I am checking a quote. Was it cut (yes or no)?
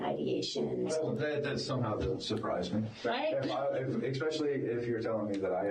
no